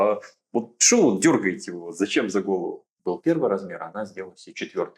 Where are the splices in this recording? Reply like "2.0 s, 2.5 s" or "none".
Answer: 2.9 s